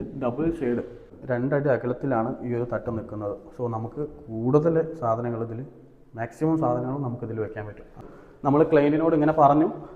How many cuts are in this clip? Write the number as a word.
two